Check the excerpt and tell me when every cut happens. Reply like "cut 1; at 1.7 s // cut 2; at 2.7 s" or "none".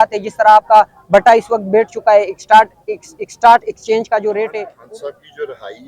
cut 1; at 4.7 s